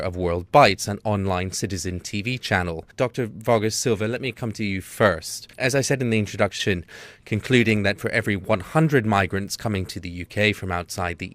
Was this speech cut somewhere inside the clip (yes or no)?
no